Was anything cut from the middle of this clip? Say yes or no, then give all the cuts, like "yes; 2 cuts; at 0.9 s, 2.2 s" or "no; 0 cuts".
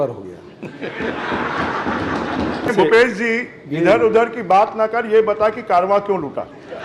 yes; 1 cut; at 2.7 s